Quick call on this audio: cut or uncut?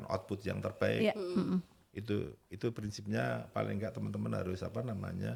uncut